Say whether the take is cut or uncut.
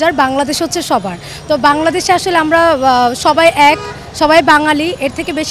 uncut